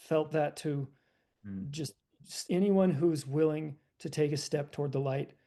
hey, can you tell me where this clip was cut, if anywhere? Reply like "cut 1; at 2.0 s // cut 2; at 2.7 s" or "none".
none